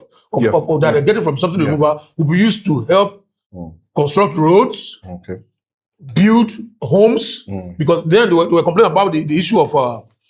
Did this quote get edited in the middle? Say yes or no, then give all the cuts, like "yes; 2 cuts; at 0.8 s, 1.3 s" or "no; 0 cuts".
yes; 1 cut; at 6.7 s